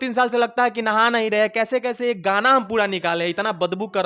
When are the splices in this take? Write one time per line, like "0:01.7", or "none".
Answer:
none